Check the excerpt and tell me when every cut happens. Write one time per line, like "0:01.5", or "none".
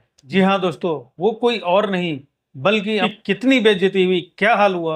0:03.0